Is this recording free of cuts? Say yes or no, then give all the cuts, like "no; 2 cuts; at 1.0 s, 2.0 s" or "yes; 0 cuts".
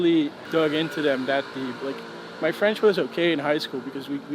yes; 0 cuts